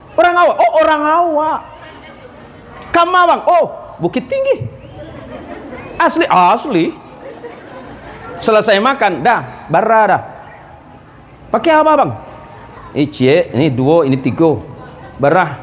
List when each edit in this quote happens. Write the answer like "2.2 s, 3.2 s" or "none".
none